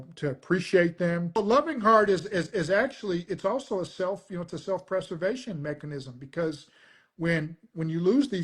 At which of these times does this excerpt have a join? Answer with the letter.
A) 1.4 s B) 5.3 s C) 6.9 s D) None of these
A